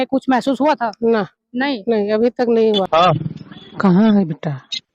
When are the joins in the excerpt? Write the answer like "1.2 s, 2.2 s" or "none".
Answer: 2.9 s